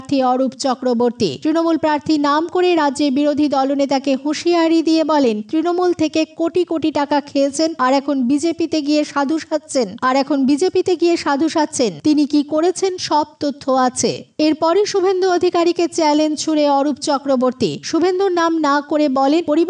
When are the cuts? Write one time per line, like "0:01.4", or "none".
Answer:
none